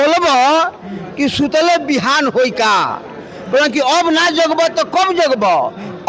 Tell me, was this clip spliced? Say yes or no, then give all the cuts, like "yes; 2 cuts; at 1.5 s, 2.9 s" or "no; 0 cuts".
no; 0 cuts